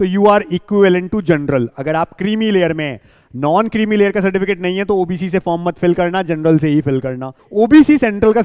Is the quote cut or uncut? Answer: cut